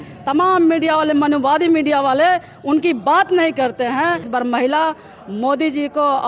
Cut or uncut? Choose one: cut